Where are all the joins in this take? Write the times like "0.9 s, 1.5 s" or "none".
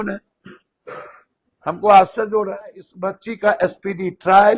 2.9 s